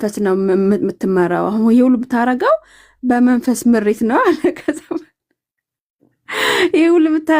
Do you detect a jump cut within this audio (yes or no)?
no